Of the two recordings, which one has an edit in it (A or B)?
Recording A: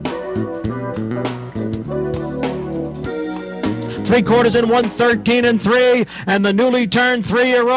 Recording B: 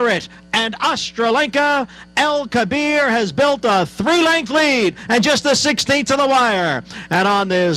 A